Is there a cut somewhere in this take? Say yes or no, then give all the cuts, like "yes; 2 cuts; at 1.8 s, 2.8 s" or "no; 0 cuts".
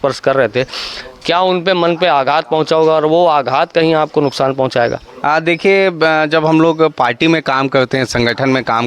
no; 0 cuts